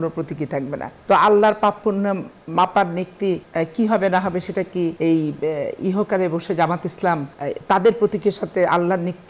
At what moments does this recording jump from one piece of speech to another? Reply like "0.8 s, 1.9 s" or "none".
0.9 s, 3.5 s, 5.0 s, 7.3 s